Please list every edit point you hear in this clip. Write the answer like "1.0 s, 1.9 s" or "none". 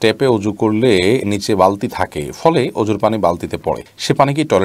none